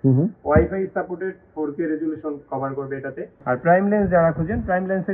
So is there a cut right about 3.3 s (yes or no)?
yes